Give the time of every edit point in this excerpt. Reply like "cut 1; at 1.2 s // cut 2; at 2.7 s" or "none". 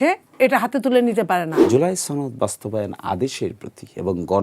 cut 1; at 1.5 s